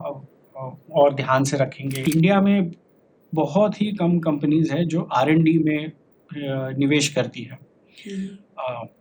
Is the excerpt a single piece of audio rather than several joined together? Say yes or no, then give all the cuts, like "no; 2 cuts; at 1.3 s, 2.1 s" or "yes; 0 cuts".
no; 1 cut; at 1.9 s